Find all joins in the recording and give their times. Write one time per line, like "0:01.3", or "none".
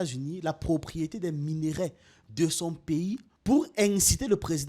0:03.3